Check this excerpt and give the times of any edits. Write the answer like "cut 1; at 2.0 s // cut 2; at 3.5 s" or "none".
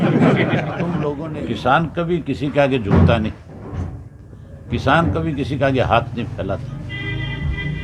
cut 1; at 1.2 s